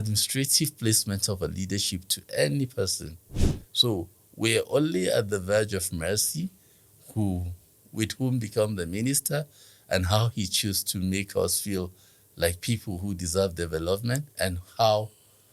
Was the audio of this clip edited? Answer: yes; 1 cut; at 14.3 s

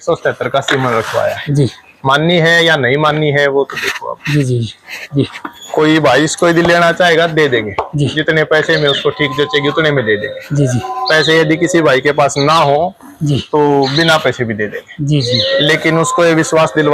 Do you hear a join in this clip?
no; 0 cuts

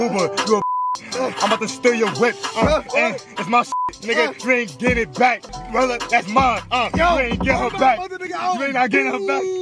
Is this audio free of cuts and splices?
yes; 0 cuts

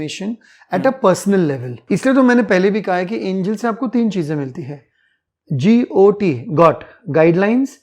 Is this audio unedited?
no; 1 cut; at 1.7 s

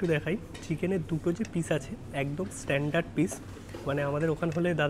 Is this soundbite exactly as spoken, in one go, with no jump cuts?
yes; 0 cuts

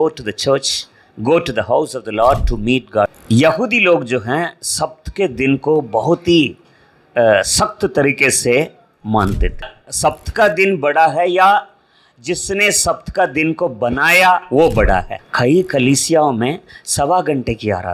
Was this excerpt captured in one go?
no; 3 cuts; at 3.1 s, 9.7 s, 15.2 s

